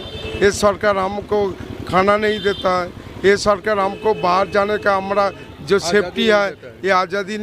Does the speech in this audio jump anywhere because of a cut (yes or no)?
no